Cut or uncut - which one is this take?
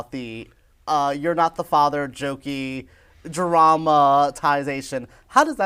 uncut